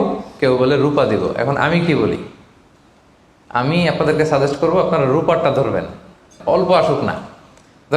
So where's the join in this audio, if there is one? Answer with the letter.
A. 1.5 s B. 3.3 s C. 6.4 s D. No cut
C